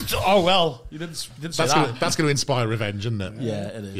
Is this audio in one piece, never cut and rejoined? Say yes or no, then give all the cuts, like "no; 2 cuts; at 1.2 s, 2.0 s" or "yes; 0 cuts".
yes; 0 cuts